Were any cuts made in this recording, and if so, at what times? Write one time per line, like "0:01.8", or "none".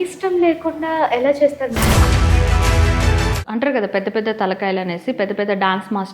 0:03.4